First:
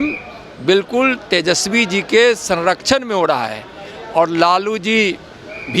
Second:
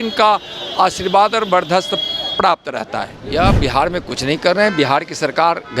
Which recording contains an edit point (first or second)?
second